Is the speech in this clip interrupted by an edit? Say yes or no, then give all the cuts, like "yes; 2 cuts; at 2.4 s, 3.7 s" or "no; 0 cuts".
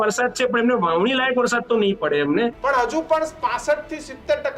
yes; 1 cut; at 2.6 s